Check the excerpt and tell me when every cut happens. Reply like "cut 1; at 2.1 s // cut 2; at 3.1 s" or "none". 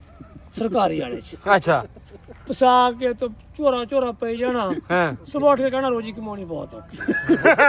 none